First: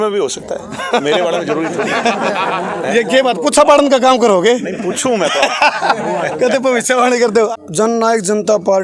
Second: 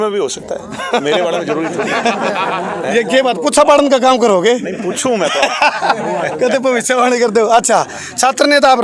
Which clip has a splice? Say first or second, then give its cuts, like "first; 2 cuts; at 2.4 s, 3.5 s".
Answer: first; 1 cut; at 7.5 s